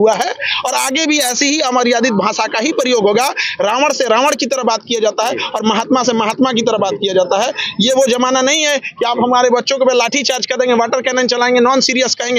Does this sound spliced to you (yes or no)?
no